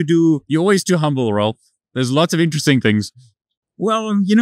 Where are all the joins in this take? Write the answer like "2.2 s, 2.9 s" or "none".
none